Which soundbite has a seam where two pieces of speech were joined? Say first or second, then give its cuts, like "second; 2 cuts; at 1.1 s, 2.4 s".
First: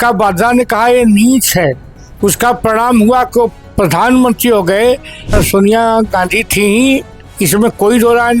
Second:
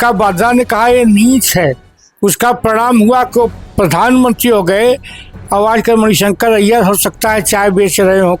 first; 1 cut; at 5.4 s